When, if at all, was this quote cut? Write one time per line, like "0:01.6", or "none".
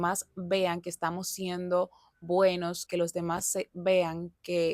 0:02.8